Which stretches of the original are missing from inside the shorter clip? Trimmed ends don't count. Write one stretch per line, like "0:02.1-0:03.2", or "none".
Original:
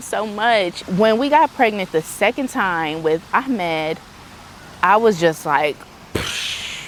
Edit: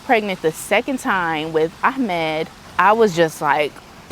0:04.1-0:04.6